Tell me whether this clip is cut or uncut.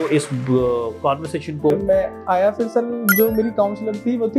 cut